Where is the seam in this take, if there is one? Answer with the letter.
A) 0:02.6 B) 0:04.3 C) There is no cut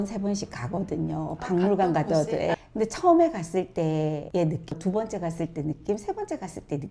C